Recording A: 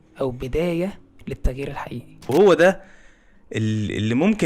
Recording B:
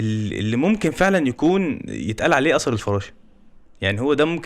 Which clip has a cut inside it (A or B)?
A